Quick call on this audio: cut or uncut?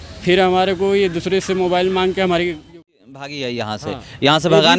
cut